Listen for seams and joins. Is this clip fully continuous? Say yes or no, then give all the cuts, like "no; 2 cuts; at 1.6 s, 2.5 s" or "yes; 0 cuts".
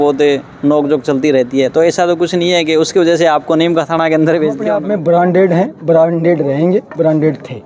no; 1 cut; at 4.9 s